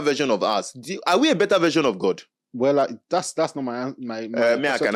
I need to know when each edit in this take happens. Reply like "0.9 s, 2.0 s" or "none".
none

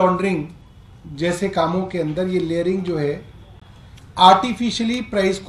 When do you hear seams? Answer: none

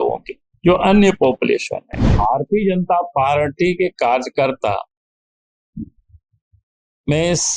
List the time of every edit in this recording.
2.1 s

